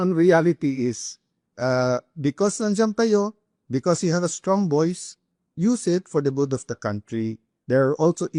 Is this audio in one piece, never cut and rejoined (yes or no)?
yes